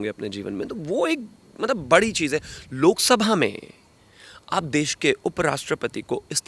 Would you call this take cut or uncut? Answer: uncut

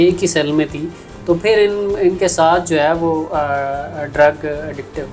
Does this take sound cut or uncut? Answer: uncut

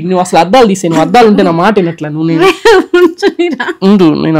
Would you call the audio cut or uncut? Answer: uncut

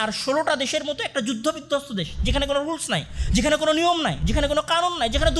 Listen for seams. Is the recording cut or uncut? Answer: uncut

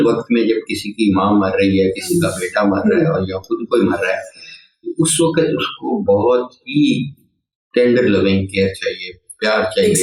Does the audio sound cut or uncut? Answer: uncut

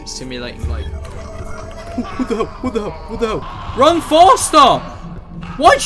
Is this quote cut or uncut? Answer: cut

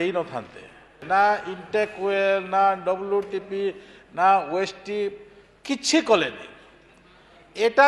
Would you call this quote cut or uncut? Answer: cut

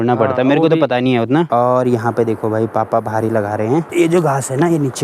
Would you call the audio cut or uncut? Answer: cut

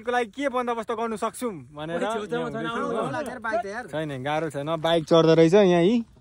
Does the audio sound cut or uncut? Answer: uncut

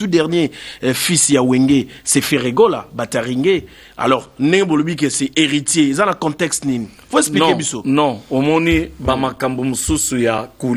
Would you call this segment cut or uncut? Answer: uncut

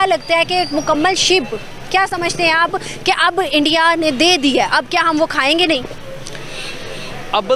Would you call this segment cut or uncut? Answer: uncut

